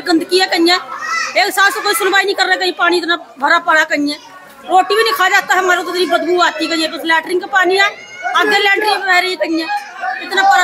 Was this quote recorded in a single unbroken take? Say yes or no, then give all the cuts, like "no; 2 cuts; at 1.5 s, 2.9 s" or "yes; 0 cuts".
yes; 0 cuts